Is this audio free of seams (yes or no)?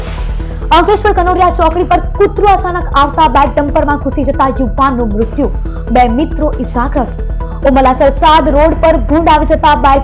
yes